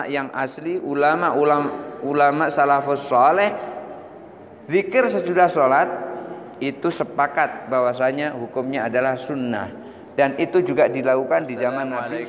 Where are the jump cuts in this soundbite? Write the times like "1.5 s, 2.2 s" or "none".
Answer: none